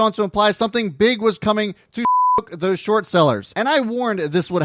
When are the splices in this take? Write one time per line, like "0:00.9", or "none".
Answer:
0:03.5